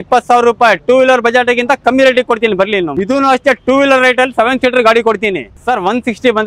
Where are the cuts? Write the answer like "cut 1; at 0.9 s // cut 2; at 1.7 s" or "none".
cut 1; at 2.9 s // cut 2; at 5.5 s